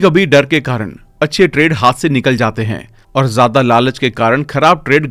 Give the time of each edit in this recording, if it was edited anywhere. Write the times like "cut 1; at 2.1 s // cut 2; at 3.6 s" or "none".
none